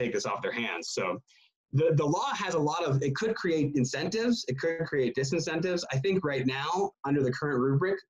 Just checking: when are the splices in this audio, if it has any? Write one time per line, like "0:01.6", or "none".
0:07.0